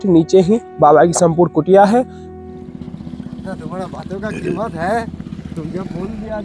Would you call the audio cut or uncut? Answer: cut